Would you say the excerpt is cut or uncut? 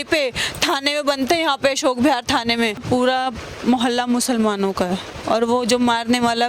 cut